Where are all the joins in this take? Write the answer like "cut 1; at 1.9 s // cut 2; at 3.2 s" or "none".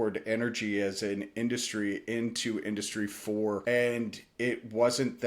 cut 1; at 3.6 s